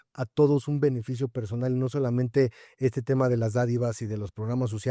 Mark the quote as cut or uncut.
uncut